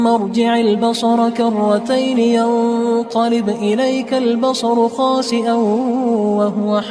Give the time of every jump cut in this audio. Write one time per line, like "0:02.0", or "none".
none